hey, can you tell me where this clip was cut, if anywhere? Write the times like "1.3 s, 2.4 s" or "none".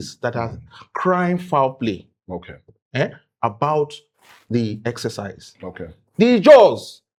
none